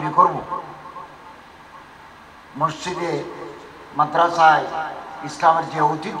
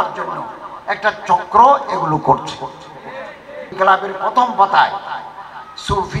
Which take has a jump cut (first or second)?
second